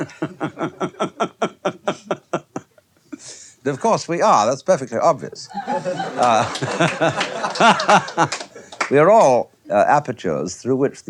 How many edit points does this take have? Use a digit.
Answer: 0